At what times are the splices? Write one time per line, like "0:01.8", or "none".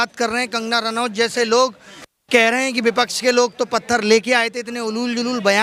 none